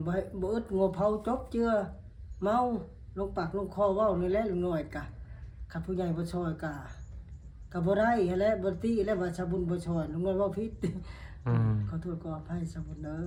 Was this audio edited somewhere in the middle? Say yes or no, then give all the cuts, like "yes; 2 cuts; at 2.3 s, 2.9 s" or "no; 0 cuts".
no; 0 cuts